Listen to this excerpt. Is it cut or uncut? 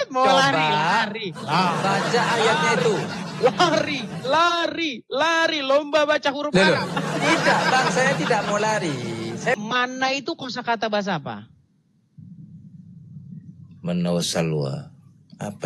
cut